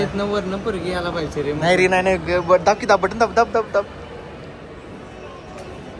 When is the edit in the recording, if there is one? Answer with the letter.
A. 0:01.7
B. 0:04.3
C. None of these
C